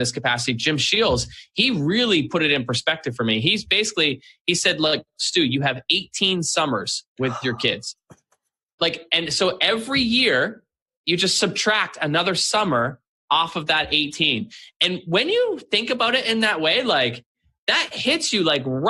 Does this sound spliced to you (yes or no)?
no